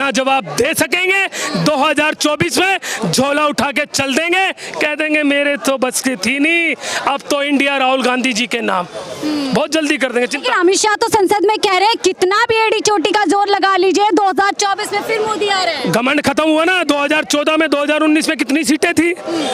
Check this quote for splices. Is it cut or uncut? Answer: uncut